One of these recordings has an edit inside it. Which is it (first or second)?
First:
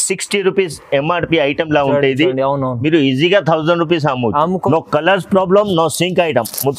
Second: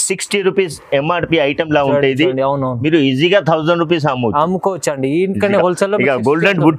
first